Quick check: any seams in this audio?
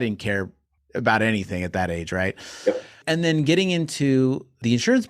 yes; 1 cut; at 3.0 s

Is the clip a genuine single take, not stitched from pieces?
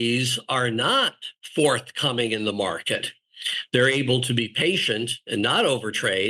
yes; 0 cuts

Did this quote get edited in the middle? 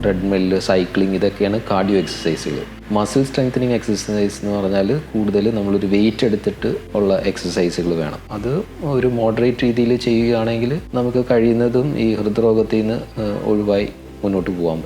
yes; 3 cuts; at 6.8 s, 8.3 s, 10.8 s

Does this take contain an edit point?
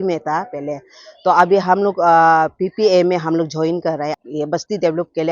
yes; 1 cut; at 4.1 s

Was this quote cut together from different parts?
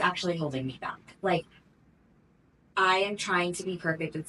no; 0 cuts

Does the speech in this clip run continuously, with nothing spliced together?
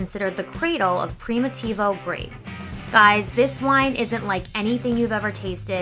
yes; 0 cuts

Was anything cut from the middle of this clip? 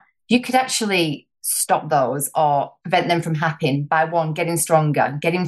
no; 0 cuts

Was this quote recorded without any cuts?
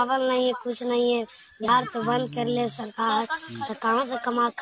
yes; 0 cuts

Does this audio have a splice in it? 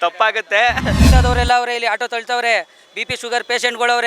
yes; 1 cut; at 1.0 s

